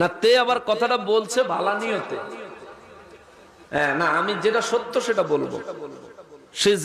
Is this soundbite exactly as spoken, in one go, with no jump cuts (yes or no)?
yes